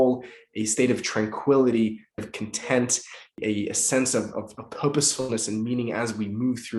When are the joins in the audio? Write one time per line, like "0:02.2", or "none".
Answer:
0:02.2